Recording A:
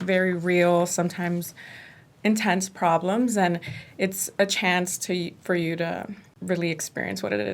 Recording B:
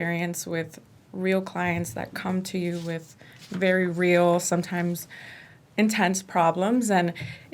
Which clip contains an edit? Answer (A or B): A